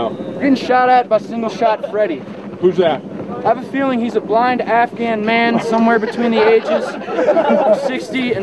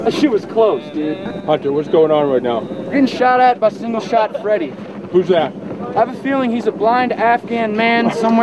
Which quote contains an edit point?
second; 1 cut; at 1.3 s

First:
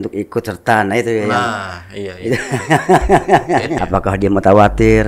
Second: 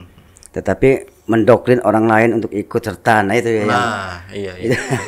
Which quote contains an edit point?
first; 1 cut; at 3.8 s

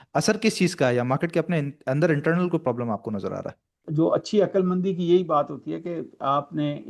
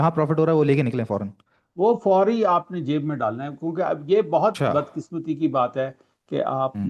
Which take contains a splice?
first; 1 cut; at 3.6 s

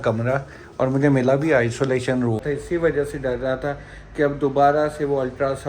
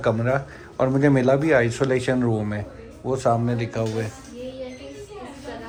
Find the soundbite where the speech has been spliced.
first; 1 cut; at 2.4 s

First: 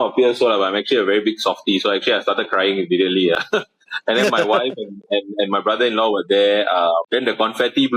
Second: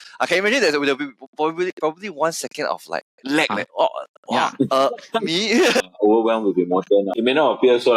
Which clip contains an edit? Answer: second; 1 cut; at 5.8 s

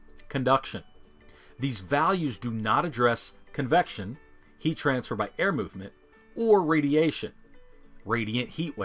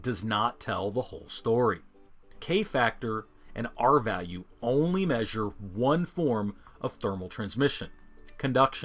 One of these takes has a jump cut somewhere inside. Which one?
second; 1 cut; at 2.4 s

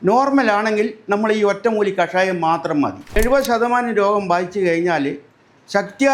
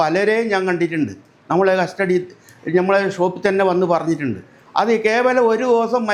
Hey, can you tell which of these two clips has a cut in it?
first; 1 cut; at 3.2 s

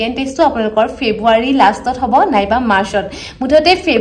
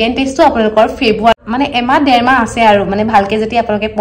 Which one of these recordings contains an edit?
second; 1 cut; at 1.3 s

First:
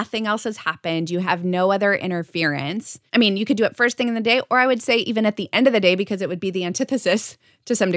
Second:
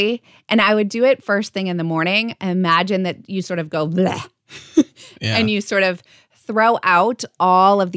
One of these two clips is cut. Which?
first; 1 cut; at 3.0 s

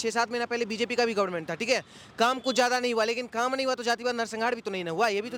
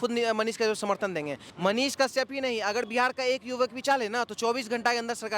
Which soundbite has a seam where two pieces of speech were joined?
second; 1 cut; at 1.4 s

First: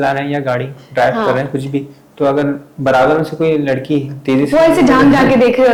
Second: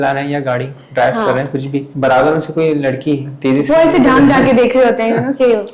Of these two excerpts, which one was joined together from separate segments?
second; 1 cut; at 1.9 s

